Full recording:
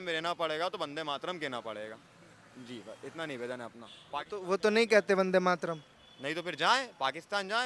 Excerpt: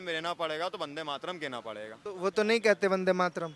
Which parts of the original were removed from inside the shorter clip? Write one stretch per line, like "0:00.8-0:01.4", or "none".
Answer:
0:02.0-0:04.3